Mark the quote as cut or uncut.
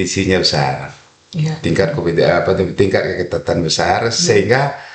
uncut